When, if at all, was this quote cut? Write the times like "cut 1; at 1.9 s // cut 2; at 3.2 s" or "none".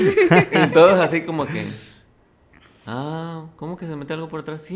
none